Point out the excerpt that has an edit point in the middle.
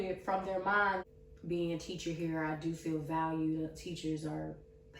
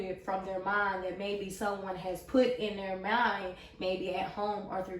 first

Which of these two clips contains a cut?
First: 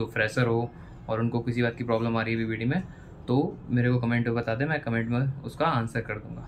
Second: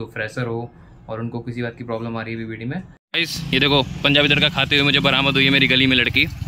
second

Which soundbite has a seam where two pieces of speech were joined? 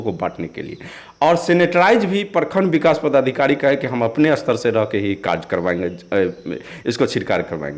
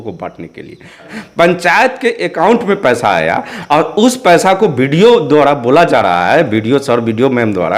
second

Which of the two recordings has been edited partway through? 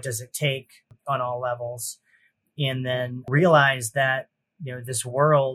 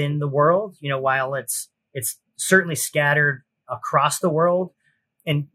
first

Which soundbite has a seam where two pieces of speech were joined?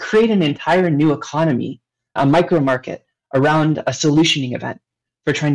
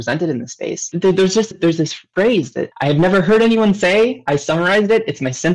second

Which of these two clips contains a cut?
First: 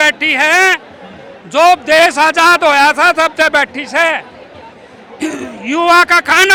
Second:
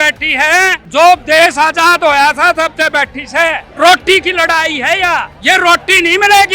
second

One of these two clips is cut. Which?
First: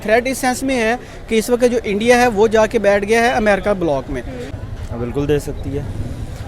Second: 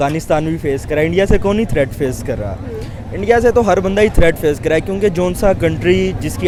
first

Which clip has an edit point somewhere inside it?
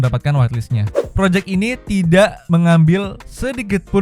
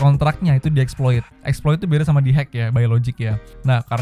first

